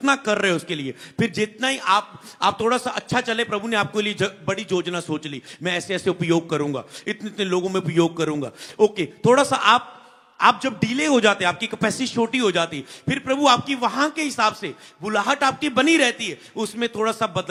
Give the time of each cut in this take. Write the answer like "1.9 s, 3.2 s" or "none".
none